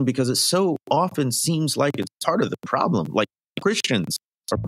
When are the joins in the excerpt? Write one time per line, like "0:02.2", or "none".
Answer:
none